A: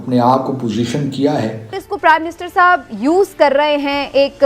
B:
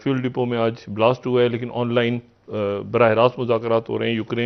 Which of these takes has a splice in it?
A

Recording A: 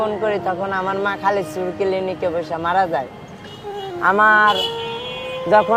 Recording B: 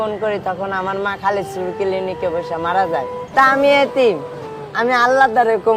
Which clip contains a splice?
B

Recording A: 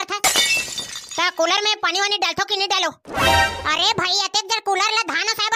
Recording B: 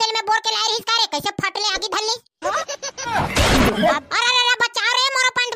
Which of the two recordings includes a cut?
B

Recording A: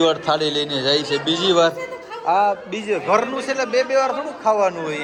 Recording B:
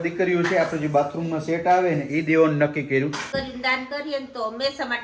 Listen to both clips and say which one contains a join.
B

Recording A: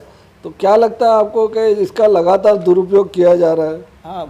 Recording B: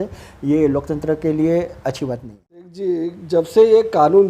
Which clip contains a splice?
B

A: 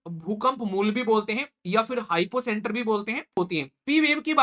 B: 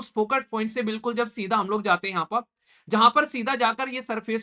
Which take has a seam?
A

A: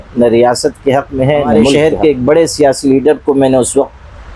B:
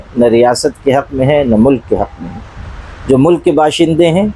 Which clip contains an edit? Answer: A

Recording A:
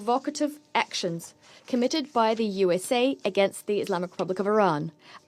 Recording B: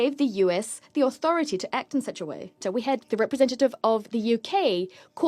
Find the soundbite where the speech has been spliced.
B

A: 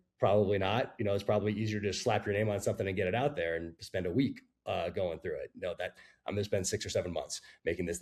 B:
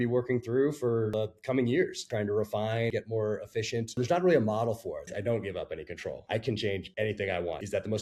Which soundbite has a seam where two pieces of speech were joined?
B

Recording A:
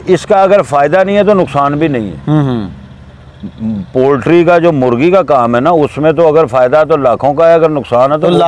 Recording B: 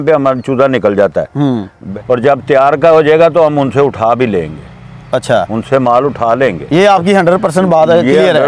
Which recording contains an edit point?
B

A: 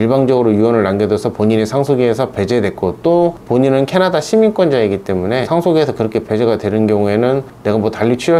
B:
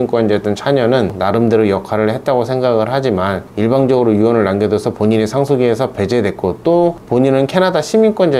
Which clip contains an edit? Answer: B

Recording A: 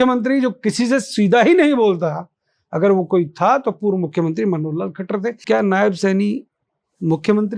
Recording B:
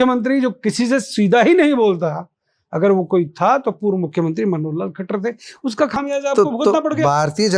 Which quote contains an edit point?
A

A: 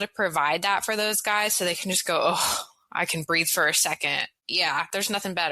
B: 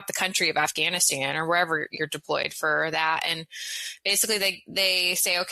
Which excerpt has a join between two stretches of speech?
A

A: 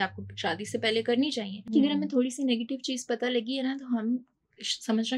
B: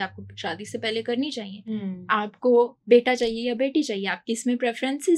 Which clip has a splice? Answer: A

